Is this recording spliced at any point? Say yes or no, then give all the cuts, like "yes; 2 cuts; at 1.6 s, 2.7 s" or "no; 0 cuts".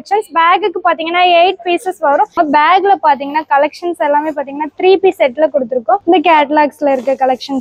yes; 1 cut; at 2.3 s